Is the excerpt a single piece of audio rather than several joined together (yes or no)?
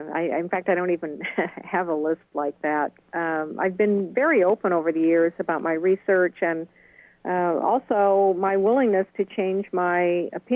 no